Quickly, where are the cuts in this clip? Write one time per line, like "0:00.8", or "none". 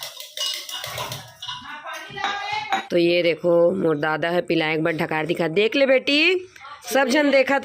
0:02.8